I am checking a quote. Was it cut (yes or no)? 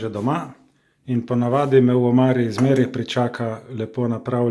no